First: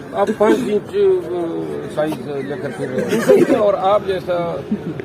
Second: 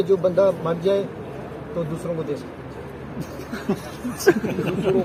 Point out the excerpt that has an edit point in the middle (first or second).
first